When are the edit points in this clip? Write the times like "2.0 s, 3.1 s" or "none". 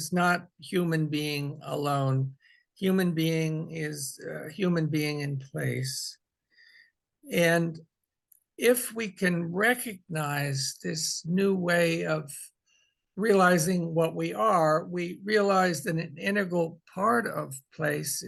none